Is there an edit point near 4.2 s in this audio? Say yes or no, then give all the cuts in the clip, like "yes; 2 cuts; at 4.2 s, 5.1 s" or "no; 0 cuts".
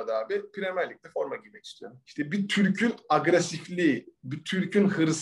no; 1 cut; at 2.0 s